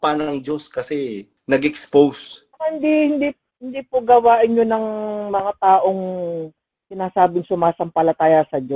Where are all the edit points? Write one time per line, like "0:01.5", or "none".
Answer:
0:01.3